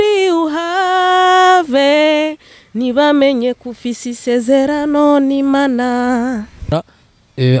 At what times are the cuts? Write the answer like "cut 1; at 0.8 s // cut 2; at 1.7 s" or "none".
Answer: cut 1; at 6.7 s